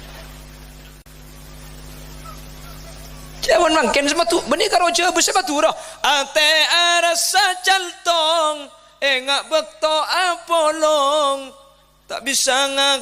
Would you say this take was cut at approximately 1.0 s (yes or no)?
yes